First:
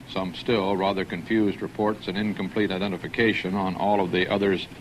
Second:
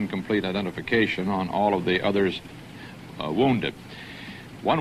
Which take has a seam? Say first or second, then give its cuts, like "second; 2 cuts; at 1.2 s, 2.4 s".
first; 1 cut; at 1.0 s